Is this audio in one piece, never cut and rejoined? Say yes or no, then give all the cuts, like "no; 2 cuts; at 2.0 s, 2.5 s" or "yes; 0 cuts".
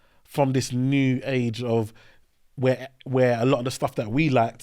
yes; 0 cuts